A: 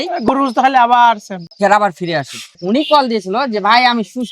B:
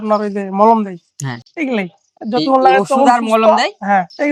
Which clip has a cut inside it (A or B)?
A